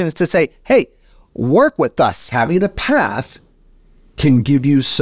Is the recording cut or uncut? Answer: cut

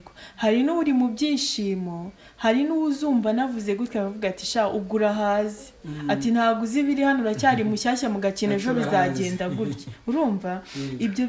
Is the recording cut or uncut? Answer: uncut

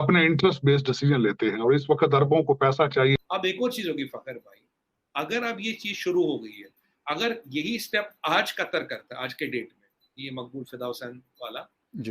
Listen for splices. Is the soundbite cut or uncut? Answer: cut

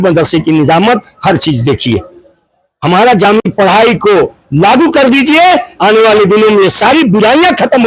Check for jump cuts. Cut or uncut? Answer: cut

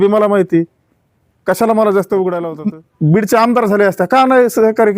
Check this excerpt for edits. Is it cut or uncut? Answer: cut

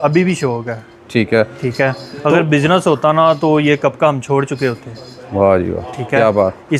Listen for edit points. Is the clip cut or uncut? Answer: uncut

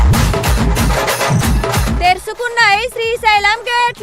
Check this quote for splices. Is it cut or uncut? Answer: uncut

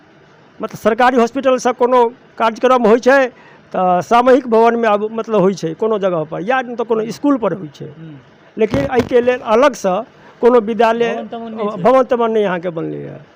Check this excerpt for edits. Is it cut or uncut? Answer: uncut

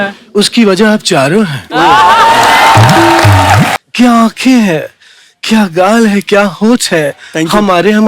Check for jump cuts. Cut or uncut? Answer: cut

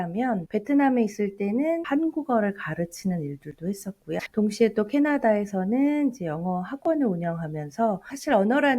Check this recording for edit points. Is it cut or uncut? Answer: cut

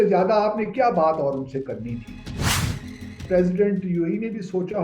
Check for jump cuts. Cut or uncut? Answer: cut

